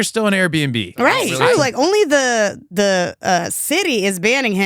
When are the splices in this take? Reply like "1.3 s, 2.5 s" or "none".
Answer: 1.3 s